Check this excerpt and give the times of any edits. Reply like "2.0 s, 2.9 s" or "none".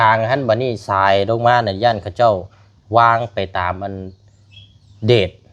none